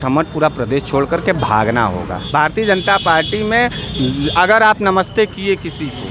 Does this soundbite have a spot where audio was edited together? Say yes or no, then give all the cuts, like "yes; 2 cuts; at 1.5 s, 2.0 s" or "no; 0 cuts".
yes; 1 cut; at 2.2 s